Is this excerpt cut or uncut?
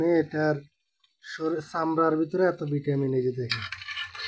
uncut